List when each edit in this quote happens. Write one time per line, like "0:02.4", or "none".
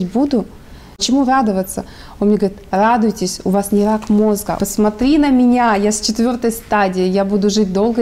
0:01.0
0:04.5